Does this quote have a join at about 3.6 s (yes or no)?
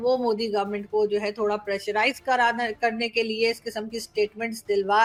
no